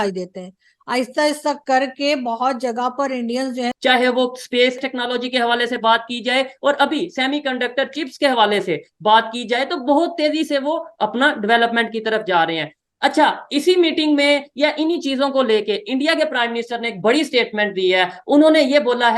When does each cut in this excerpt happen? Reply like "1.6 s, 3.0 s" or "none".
3.7 s, 4.8 s